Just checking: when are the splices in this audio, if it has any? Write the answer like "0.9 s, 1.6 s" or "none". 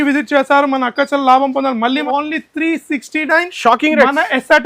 2.0 s